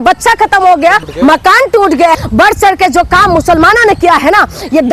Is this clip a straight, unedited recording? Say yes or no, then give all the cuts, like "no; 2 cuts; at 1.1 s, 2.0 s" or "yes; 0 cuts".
no; 1 cut; at 2.2 s